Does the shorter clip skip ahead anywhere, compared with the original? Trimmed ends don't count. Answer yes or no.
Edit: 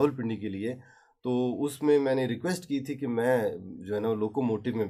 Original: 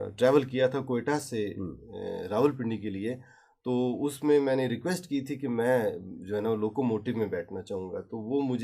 no